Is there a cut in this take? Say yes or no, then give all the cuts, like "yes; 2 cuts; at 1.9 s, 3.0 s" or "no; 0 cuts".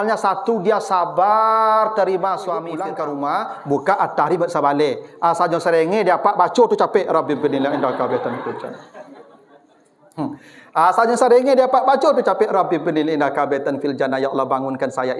yes; 1 cut; at 2.7 s